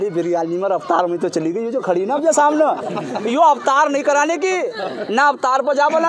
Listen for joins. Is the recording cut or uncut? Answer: uncut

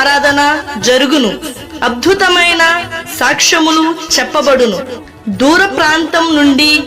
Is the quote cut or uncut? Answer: cut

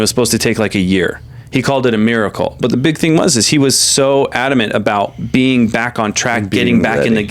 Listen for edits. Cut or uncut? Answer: uncut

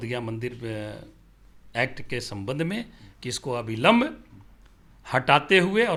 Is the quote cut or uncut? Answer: uncut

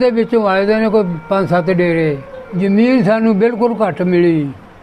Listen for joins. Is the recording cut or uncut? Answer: cut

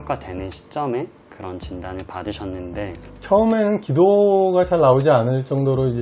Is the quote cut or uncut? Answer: cut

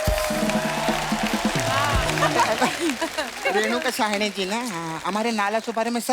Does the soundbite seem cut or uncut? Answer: uncut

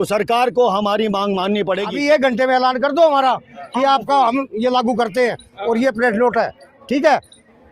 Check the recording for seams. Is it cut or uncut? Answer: cut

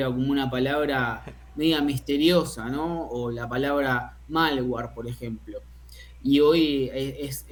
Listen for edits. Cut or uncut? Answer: uncut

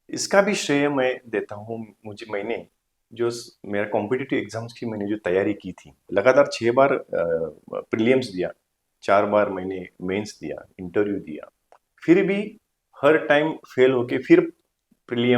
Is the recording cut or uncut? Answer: cut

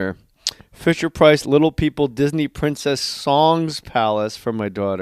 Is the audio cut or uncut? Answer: cut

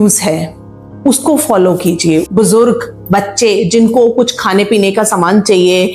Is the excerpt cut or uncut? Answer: cut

